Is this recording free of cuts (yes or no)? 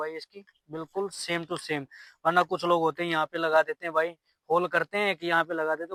yes